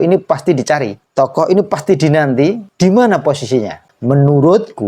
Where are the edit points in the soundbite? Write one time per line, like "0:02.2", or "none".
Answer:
0:01.0
0:02.7
0:03.9